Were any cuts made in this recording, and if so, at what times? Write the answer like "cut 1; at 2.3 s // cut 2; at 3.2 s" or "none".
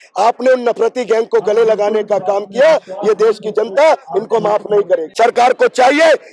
cut 1; at 5.1 s